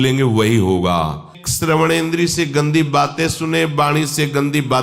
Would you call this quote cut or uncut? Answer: cut